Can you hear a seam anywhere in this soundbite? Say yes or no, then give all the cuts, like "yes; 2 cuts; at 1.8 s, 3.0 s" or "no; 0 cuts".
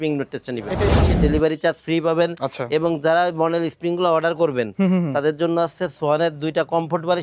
yes; 1 cut; at 0.9 s